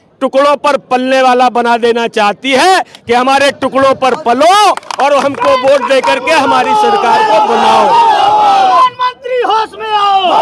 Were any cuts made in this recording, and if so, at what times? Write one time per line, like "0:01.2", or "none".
none

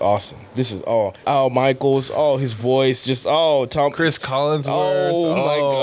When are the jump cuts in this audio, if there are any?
0:01.2

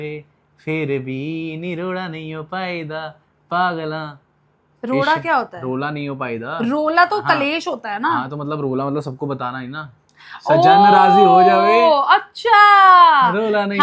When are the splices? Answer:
none

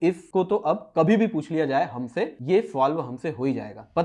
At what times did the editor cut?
none

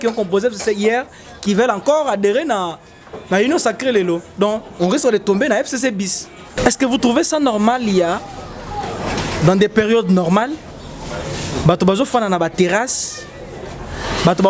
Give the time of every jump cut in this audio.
0:06.5

